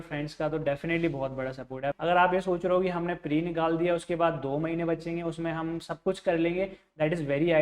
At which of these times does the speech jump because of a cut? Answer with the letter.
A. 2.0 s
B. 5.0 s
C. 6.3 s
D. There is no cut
A